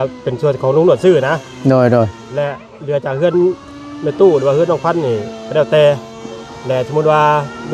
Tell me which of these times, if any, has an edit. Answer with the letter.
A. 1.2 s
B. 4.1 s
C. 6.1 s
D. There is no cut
D